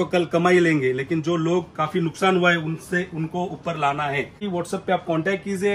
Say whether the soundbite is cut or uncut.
cut